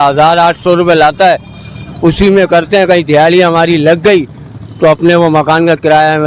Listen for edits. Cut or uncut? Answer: uncut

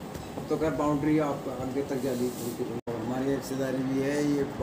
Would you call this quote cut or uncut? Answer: cut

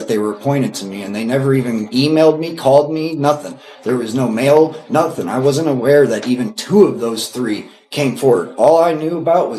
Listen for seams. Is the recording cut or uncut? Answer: uncut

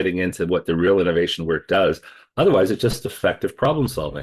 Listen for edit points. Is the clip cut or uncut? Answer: uncut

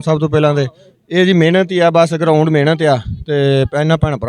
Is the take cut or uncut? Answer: uncut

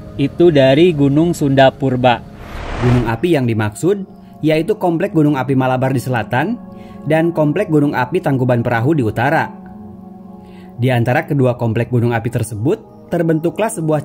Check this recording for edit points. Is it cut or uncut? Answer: cut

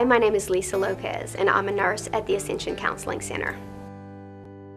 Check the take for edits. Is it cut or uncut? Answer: cut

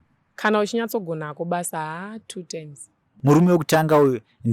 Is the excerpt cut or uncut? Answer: cut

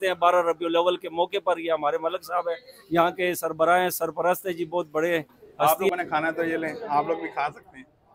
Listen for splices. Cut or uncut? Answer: cut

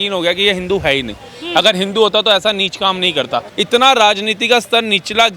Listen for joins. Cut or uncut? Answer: cut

